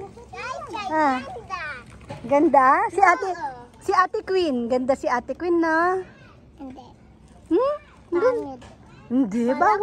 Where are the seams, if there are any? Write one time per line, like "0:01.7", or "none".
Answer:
none

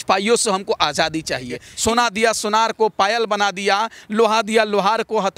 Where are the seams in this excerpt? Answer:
0:01.6

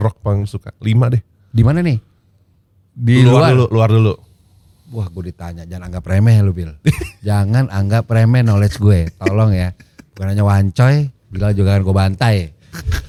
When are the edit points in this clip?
none

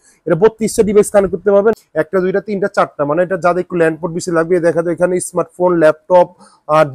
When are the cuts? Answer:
0:01.7

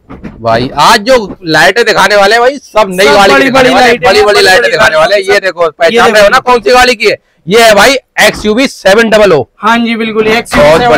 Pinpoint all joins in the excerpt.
none

